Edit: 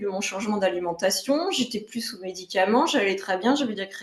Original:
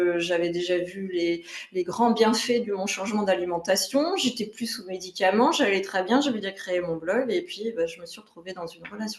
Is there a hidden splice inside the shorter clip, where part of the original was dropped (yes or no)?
no